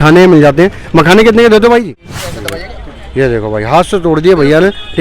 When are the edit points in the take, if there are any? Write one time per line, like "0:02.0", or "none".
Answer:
0:01.8